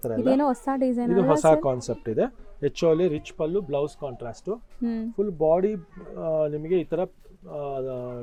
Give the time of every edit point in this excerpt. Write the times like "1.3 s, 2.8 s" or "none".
none